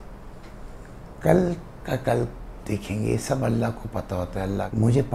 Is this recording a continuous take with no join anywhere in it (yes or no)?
yes